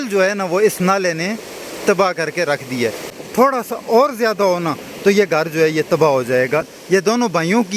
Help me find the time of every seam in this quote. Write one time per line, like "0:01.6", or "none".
0:03.1
0:06.7